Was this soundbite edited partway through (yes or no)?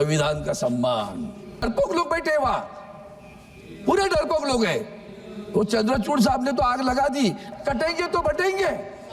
yes